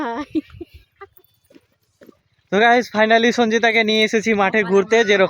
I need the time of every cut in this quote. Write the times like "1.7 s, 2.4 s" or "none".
2.4 s